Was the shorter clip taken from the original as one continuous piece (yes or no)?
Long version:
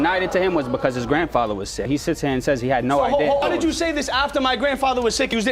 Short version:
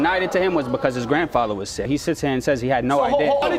yes